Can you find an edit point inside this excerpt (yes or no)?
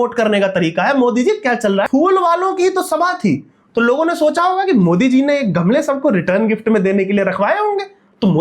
yes